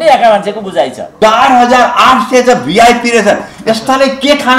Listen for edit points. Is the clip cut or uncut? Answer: cut